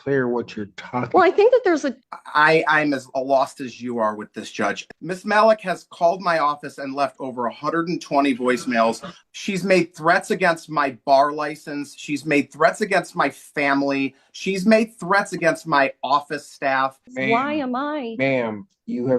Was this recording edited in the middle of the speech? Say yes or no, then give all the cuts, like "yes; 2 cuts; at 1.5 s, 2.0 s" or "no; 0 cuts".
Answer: yes; 4 cuts; at 1.9 s, 4.9 s, 9.1 s, 17.1 s